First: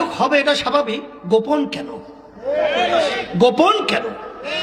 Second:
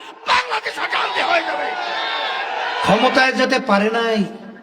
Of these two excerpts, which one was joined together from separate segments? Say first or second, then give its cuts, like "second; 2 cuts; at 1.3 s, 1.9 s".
second; 1 cut; at 2.1 s